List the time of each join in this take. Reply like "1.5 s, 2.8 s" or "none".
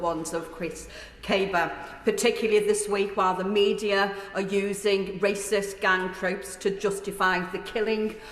none